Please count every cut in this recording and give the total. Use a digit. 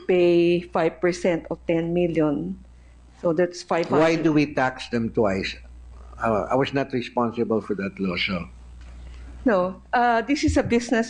1